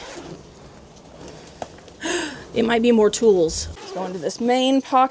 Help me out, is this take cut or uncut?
cut